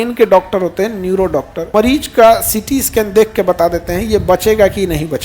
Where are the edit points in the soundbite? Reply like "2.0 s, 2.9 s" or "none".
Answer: 1.7 s